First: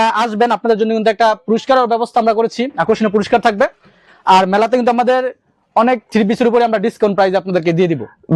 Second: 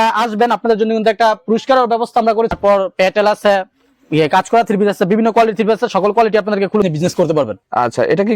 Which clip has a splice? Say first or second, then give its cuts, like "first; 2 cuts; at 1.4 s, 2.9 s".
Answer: second; 2 cuts; at 2.6 s, 6.8 s